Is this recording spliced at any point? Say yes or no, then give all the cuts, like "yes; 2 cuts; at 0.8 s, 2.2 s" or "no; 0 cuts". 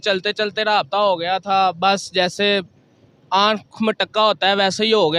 no; 0 cuts